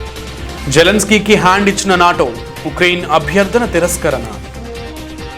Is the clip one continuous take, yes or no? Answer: yes